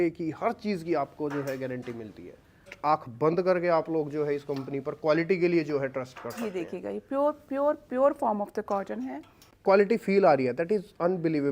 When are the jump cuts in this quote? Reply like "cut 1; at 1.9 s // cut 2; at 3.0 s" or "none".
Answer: cut 1; at 2.7 s // cut 2; at 9.5 s